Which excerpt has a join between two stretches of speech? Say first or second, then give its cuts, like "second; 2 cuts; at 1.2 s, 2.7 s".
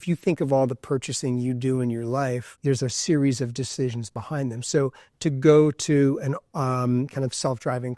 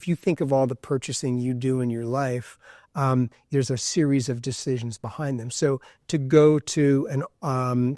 first; 1 cut; at 2.5 s